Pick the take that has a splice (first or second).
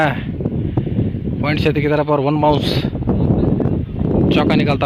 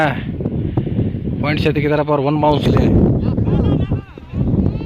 second